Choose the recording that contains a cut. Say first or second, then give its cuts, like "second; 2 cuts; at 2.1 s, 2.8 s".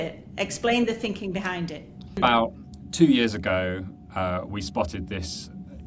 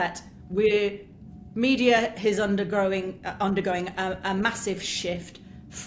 first; 1 cut; at 2.2 s